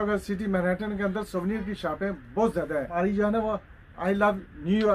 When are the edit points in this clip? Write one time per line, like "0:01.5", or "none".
0:03.0